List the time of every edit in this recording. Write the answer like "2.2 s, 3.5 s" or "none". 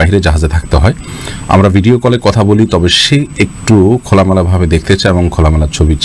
none